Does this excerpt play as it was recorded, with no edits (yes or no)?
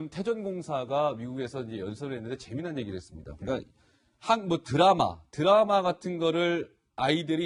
yes